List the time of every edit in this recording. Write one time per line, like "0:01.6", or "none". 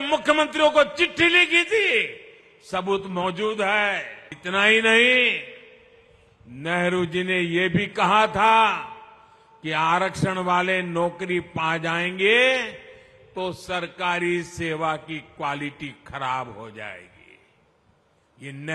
0:04.4